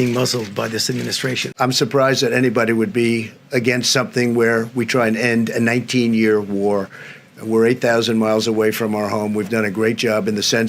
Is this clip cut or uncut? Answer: cut